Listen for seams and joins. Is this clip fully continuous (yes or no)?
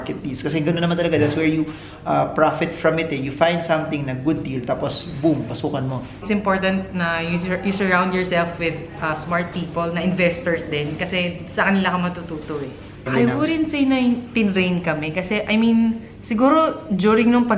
no